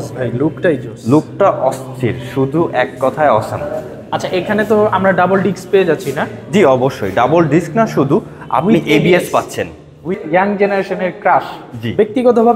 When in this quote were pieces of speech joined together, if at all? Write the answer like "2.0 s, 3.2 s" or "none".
10.2 s